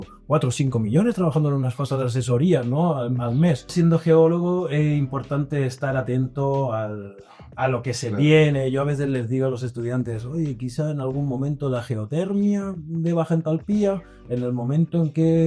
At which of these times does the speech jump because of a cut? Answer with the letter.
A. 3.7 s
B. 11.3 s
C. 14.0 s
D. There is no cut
A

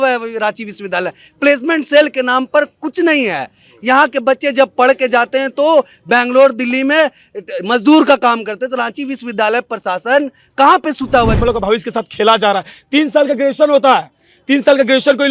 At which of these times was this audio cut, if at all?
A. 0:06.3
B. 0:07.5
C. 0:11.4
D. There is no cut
C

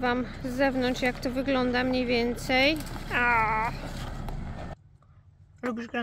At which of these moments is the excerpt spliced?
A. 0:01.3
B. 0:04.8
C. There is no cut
B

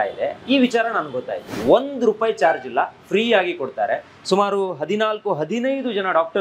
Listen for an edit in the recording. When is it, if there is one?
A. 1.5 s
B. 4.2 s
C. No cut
A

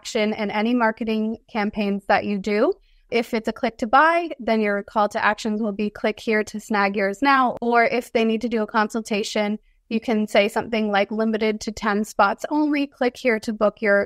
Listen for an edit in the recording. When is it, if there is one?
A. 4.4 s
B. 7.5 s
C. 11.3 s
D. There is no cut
B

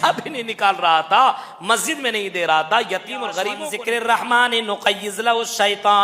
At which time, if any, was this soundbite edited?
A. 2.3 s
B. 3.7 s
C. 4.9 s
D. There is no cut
B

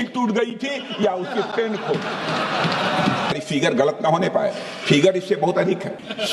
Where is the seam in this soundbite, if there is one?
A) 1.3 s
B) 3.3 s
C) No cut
B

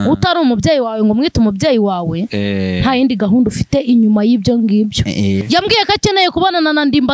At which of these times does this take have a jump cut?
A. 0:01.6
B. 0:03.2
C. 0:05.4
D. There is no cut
C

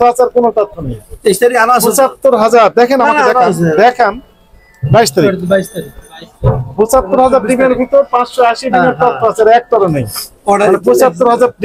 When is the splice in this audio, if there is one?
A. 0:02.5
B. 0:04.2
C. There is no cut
C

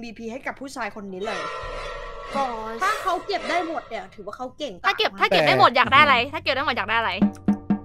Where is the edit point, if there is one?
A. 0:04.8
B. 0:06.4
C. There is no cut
A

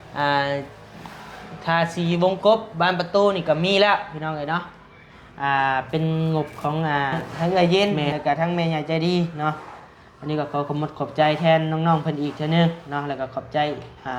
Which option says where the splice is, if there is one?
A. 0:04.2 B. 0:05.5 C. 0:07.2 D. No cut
C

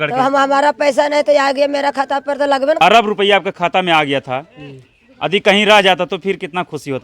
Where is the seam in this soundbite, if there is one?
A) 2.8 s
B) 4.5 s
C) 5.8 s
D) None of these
A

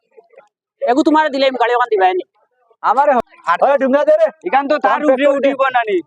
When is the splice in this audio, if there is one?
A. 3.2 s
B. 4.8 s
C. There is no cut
A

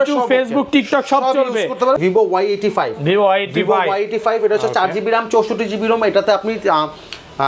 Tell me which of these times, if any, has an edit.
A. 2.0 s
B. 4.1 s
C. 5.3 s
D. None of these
A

